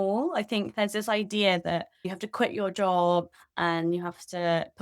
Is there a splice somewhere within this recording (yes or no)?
yes